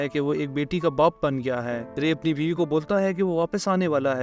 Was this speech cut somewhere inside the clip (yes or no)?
no